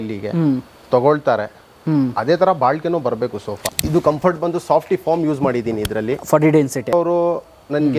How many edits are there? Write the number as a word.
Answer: two